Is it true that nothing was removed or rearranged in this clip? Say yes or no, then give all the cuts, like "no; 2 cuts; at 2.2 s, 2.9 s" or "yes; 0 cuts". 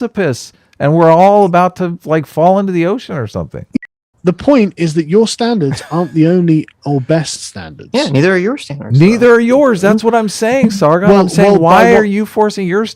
no; 1 cut; at 3.7 s